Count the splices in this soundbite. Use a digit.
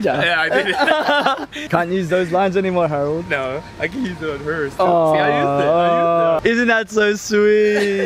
2